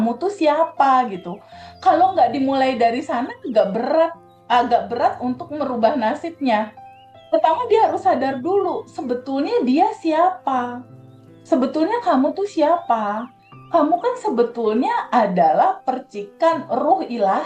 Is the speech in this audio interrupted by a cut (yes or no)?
no